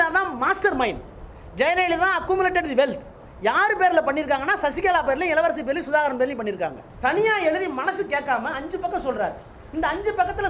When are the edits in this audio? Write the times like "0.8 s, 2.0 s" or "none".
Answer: 6.8 s